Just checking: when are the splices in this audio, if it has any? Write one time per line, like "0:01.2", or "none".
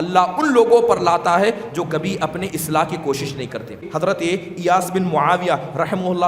0:03.9